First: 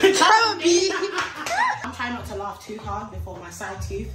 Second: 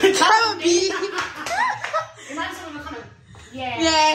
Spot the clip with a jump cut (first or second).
first